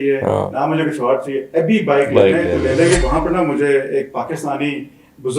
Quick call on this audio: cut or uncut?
cut